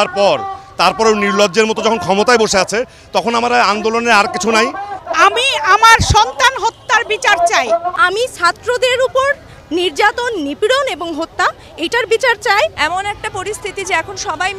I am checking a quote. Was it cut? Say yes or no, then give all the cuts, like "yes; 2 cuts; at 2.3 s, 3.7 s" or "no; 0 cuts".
yes; 3 cuts; at 5.0 s, 8.0 s, 12.8 s